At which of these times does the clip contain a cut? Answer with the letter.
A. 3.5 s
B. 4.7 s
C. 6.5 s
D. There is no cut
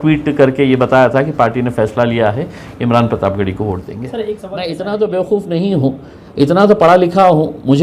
B